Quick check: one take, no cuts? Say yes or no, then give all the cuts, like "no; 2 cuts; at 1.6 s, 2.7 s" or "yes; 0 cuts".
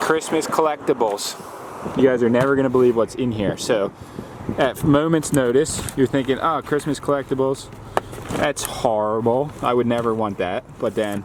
yes; 0 cuts